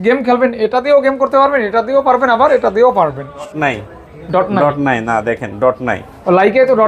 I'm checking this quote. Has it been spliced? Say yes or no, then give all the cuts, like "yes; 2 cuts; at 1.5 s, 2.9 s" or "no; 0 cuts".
yes; 1 cut; at 3.5 s